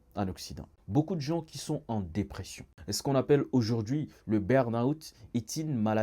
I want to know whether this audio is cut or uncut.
cut